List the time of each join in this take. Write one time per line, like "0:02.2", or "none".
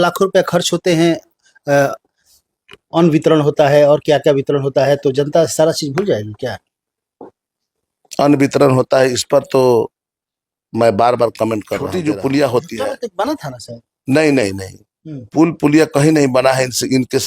0:11.9

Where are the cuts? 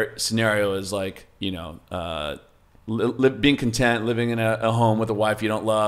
none

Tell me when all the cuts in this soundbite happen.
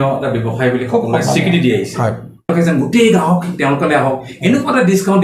0:02.5

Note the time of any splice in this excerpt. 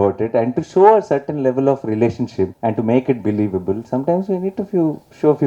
0:02.5

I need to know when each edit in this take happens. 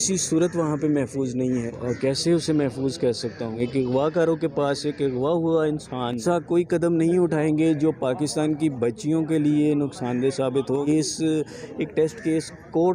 0:01.7
0:03.5
0:06.2
0:10.9

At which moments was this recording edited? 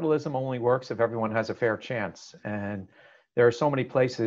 none

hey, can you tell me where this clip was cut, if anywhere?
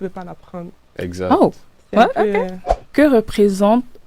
0:02.9

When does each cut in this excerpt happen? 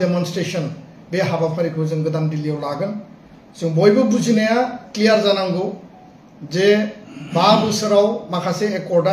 none

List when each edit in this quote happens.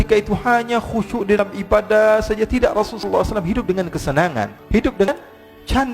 0:04.6

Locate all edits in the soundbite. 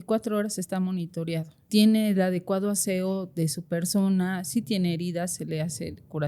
0:01.7

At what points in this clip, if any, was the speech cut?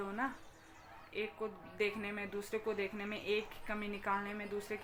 none

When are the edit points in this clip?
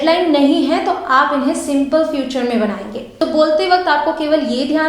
0:03.0

